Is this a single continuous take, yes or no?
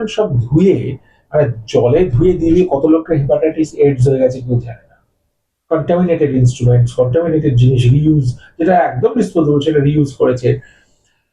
yes